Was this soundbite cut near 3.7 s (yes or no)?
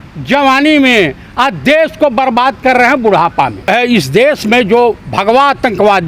yes